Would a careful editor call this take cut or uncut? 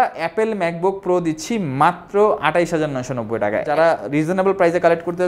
cut